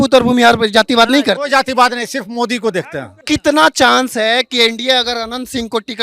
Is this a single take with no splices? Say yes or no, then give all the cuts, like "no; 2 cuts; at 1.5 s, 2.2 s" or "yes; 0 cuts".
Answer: no; 1 cut; at 3.2 s